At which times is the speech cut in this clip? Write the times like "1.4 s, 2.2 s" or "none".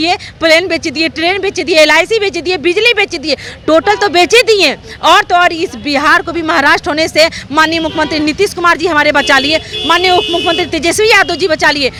none